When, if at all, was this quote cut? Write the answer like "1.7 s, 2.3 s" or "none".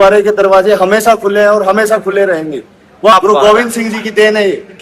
3.1 s